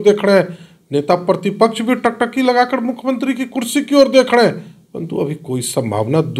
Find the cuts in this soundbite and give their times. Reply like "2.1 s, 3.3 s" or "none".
none

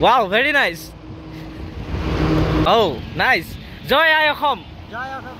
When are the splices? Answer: 2.7 s

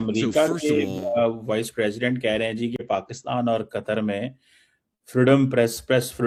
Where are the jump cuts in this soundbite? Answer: none

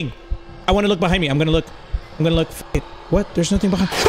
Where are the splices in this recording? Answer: 2.9 s

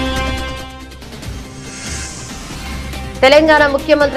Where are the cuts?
3.2 s

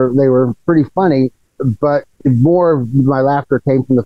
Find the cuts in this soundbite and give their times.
1.5 s

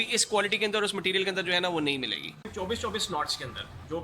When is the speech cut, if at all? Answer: 2.4 s

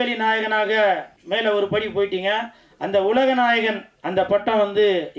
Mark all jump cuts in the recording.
1.1 s

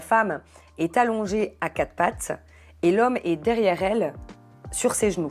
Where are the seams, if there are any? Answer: none

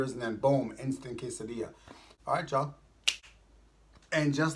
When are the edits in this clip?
2.1 s

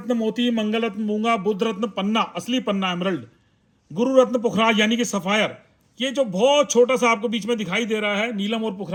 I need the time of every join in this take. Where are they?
none

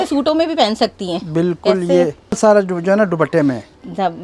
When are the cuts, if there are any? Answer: 2.4 s

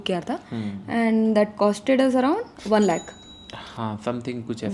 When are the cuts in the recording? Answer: none

